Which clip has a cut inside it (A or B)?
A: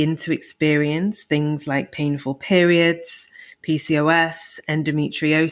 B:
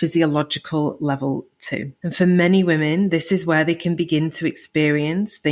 B